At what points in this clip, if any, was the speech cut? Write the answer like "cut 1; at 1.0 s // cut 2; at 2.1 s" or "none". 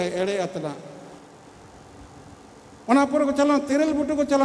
cut 1; at 1.1 s